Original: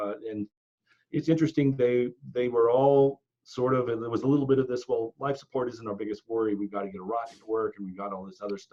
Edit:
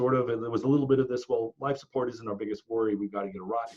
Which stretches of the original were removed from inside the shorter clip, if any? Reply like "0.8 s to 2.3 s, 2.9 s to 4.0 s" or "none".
none